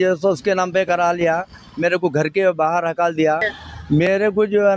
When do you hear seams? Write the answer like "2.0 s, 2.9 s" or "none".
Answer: 3.6 s